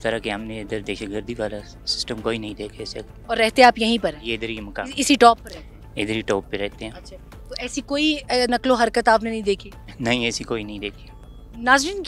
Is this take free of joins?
yes; 0 cuts

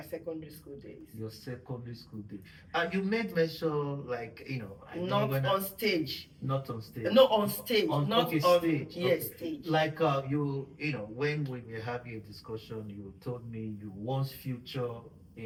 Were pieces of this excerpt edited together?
no; 0 cuts

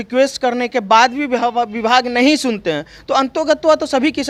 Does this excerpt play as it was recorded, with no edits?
yes; 0 cuts

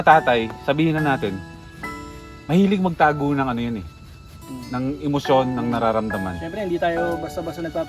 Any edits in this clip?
no; 0 cuts

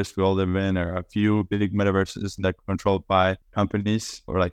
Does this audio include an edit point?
no; 0 cuts

